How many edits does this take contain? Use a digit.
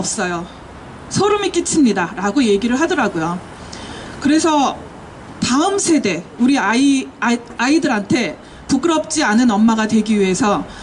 1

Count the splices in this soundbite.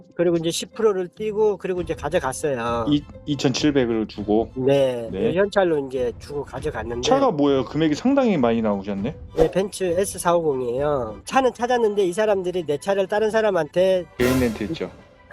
1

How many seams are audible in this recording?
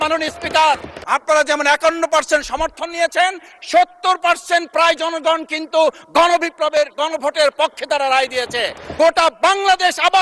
2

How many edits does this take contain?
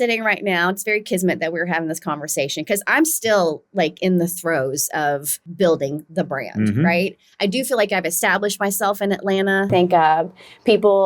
2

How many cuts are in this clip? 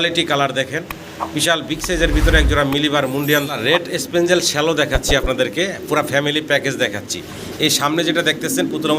1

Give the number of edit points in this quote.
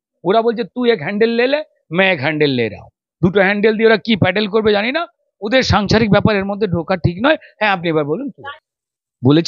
0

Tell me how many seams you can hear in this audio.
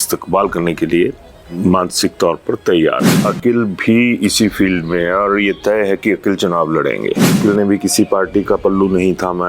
2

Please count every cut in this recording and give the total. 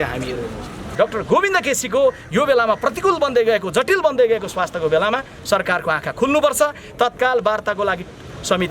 1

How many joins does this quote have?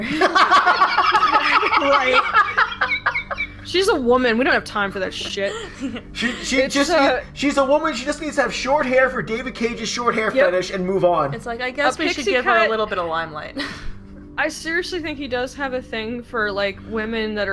0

